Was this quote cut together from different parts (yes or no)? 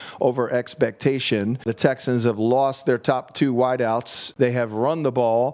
yes